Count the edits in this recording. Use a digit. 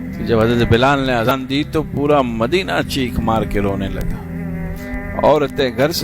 1